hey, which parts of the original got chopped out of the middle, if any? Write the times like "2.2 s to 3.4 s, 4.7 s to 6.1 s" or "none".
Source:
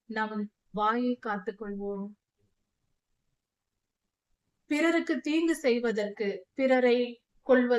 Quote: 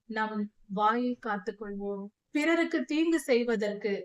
2.1 s to 4.5 s